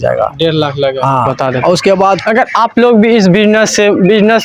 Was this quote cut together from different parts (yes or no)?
yes